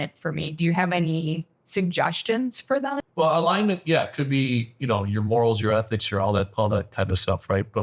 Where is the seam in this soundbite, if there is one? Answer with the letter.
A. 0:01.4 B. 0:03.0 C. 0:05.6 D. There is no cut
B